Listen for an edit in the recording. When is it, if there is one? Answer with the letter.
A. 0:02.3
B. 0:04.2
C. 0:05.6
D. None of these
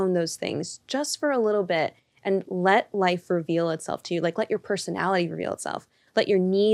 D